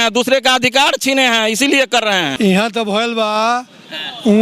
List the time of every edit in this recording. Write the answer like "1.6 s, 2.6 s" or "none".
2.3 s